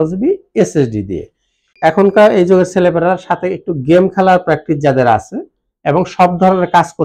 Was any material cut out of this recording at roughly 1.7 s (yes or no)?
yes